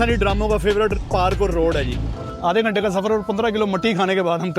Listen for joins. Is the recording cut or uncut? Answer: cut